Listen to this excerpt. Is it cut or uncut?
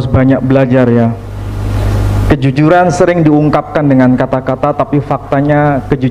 uncut